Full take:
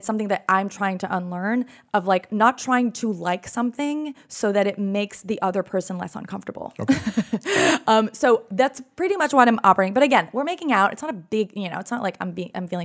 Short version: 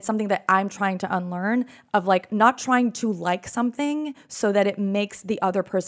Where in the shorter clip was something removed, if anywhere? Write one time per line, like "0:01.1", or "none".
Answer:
none

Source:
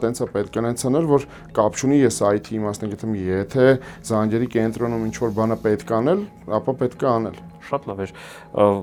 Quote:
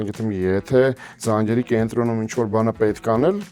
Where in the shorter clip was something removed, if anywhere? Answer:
none

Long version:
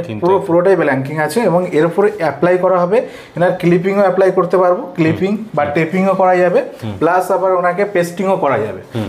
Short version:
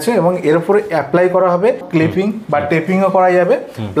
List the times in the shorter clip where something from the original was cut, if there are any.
0:01.8

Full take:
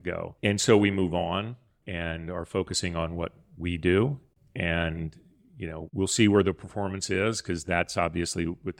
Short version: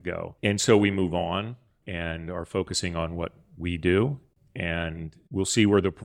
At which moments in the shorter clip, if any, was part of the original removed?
0:05.1

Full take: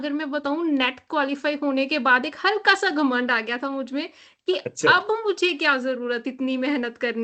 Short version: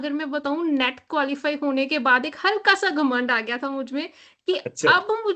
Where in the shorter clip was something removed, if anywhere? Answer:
none

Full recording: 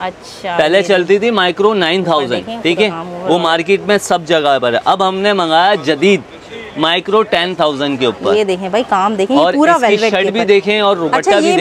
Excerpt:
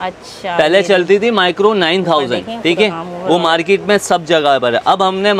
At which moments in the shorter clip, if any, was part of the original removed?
none

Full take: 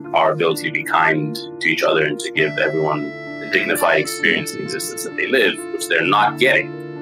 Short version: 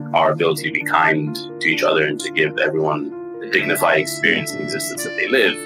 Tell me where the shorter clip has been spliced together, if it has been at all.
none

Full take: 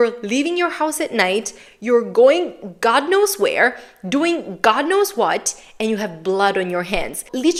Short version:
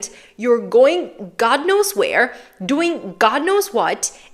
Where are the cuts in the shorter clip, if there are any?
none

